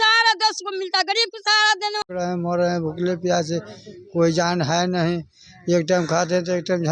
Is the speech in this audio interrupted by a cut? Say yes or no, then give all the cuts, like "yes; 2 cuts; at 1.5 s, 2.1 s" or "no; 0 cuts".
yes; 1 cut; at 2.0 s